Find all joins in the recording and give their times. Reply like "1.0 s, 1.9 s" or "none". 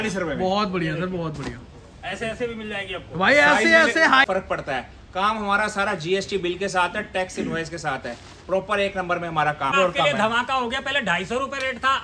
4.3 s, 9.7 s

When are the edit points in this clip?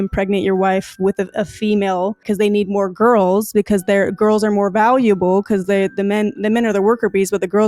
2.2 s

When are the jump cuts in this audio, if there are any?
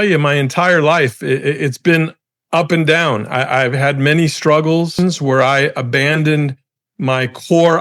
5.2 s

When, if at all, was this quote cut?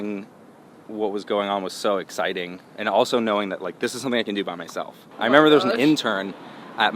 5.1 s

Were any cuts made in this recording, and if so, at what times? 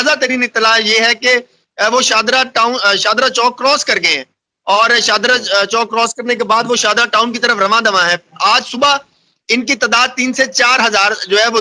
none

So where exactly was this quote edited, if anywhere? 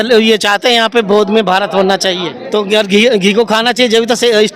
2.3 s

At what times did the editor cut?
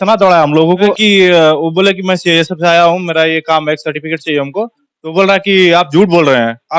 1.0 s

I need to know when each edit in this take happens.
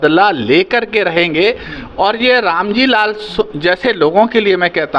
none

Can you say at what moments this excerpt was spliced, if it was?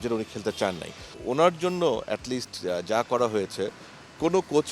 1.1 s

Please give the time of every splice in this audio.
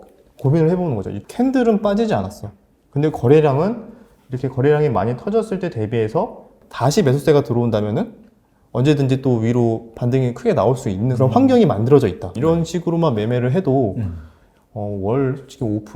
1.2 s, 6.6 s, 11.1 s, 12.3 s

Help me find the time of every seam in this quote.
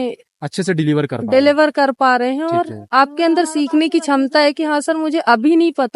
none

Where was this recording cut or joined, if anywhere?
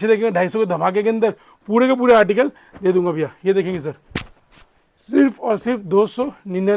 none

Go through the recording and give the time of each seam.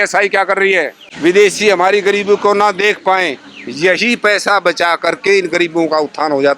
1.0 s

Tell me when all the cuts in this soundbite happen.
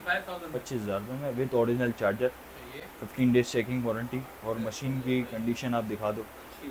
none

